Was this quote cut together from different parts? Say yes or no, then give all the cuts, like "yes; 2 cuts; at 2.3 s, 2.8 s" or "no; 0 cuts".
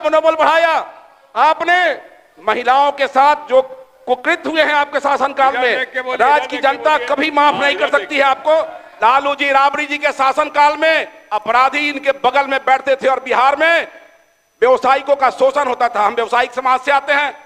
no; 0 cuts